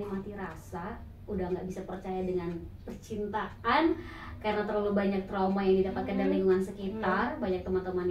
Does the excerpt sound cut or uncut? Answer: uncut